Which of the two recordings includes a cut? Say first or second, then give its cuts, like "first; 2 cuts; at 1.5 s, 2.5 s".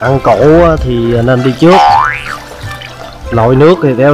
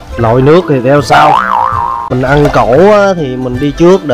second; 1 cut; at 2.1 s